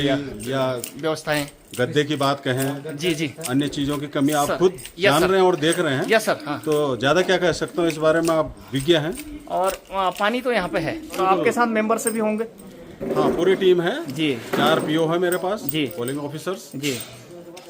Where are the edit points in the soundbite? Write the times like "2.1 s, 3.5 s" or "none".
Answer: 11.2 s